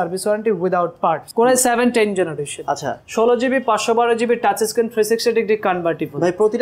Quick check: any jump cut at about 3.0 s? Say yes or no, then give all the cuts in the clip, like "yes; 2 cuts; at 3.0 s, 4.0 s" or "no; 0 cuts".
no; 1 cut; at 1.2 s